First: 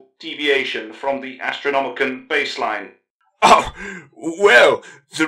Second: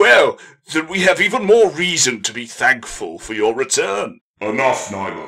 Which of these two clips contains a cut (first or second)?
second